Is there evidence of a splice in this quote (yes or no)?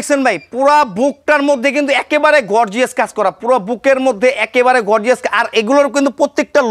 no